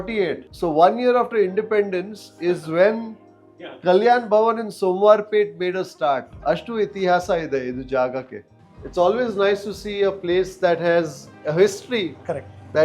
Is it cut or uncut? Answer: uncut